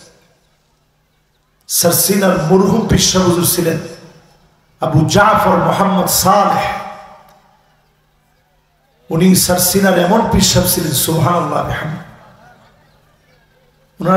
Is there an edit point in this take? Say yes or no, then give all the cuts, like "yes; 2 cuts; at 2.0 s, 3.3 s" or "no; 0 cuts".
no; 0 cuts